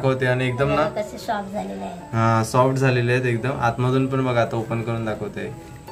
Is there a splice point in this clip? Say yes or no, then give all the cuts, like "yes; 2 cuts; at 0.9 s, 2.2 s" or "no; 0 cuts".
no; 0 cuts